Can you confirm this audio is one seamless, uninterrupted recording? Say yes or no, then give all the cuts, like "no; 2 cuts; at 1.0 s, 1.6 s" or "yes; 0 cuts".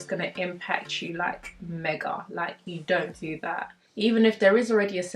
no; 1 cut; at 3.9 s